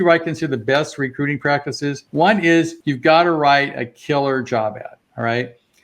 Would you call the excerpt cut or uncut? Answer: cut